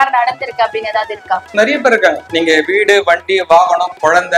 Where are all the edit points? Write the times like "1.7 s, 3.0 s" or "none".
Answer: 2.2 s